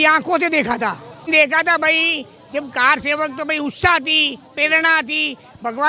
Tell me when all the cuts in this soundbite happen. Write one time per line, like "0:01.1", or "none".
0:01.3